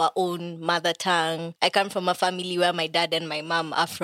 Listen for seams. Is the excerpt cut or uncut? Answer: cut